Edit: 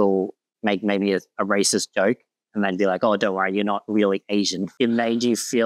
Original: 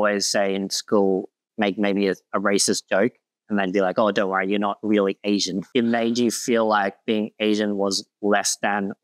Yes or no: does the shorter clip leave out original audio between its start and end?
no